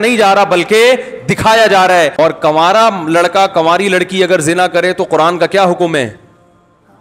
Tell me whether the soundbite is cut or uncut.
cut